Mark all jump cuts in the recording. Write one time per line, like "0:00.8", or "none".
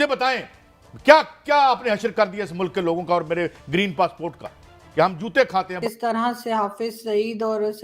0:05.8